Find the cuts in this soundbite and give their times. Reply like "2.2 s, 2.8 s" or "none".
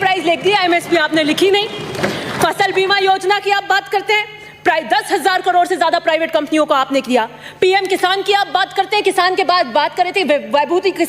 none